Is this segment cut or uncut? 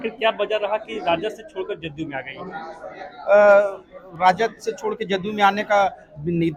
uncut